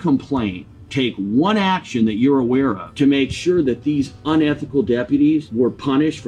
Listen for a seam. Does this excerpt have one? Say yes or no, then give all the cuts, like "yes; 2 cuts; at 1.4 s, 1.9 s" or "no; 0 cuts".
yes; 2 cuts; at 2.8 s, 5.5 s